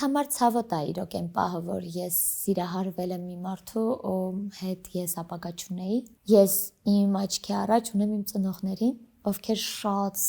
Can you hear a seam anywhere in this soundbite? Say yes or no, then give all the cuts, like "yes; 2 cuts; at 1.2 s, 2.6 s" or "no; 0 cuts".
yes; 1 cut; at 6.1 s